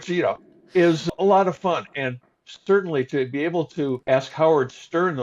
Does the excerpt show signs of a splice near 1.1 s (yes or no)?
yes